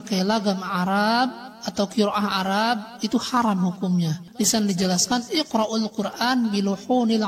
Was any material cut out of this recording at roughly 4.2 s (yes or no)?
yes